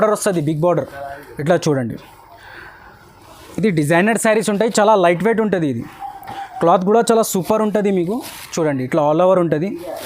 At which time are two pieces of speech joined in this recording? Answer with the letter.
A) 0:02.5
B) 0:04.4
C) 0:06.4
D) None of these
D